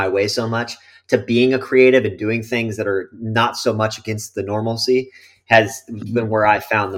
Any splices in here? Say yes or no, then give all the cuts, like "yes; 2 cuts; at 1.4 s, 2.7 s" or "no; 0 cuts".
no; 0 cuts